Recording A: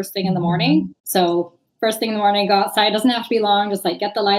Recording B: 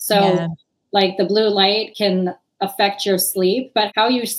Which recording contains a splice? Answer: A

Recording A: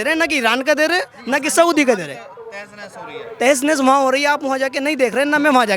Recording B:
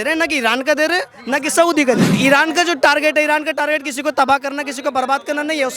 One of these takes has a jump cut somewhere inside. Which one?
B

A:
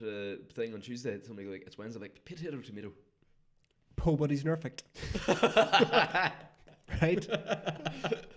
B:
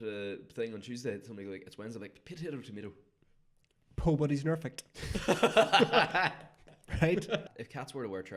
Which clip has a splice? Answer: B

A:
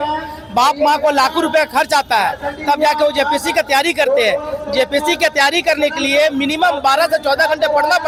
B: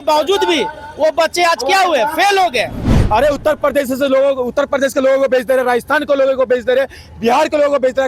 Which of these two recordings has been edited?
B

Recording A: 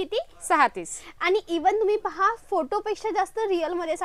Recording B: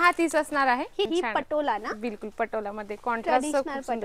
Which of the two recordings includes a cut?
B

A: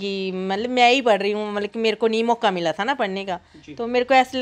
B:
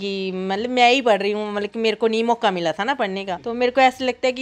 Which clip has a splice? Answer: B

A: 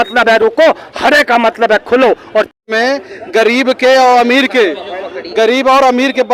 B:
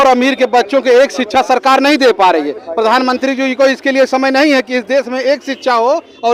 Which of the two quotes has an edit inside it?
A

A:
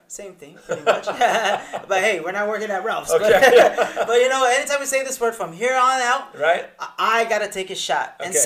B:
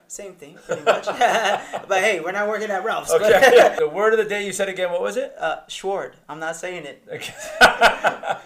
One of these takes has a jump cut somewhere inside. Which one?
B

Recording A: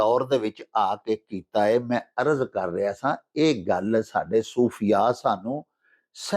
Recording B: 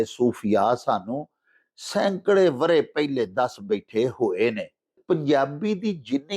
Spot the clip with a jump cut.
B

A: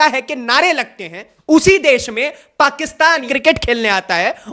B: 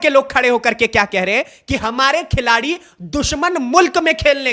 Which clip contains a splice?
A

